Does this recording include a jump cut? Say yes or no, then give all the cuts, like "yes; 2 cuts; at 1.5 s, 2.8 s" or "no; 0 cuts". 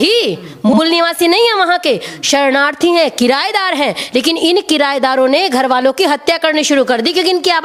no; 0 cuts